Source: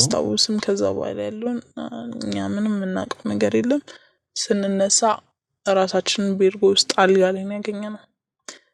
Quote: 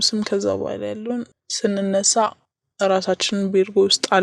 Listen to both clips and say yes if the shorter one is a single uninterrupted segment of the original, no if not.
no